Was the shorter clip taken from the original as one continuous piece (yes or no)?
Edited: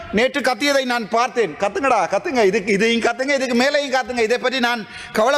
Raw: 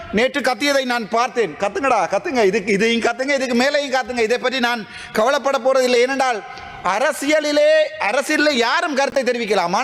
yes